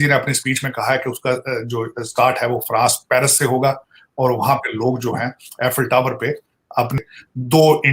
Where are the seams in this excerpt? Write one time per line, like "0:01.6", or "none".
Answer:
0:06.9